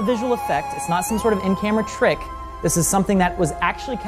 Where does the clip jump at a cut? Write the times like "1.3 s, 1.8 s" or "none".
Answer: none